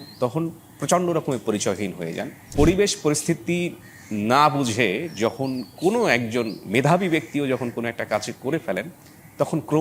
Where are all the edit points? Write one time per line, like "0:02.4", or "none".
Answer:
0:02.3

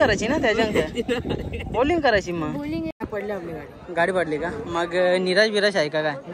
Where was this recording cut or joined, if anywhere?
0:03.0

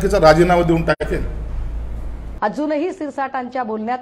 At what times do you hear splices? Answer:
0:02.2

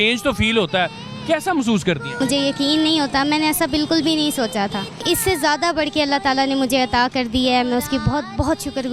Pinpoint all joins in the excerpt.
0:02.2
0:05.0

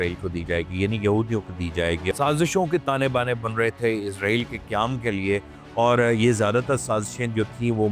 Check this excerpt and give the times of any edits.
0:02.1

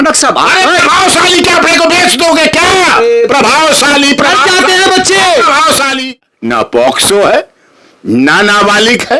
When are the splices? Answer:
0:06.1

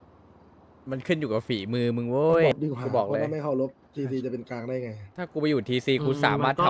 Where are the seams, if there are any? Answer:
0:02.5

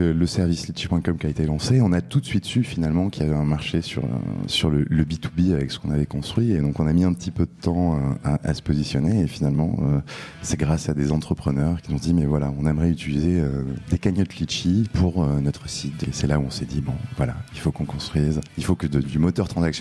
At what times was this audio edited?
0:04.5
0:11.8
0:14.9
0:16.0
0:18.5

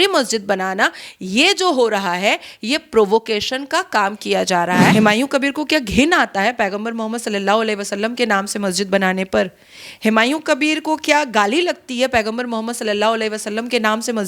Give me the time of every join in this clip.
0:04.9

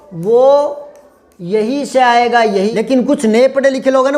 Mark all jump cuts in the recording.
0:02.7

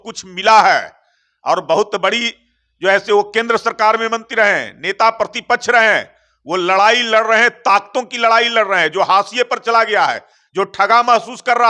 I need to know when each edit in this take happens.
none

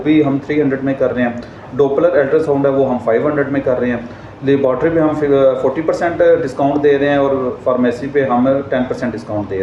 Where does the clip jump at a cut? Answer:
none

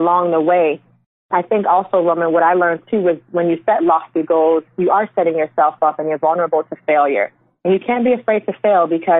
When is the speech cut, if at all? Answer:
0:01.1

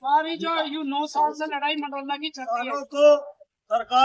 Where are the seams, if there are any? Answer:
0:02.7

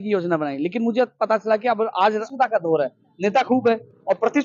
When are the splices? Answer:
0:02.3

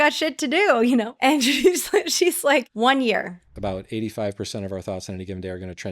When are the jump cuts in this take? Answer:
0:01.1
0:02.7
0:03.5

